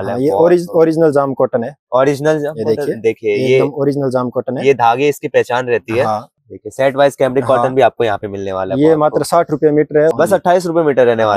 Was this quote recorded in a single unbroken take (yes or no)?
no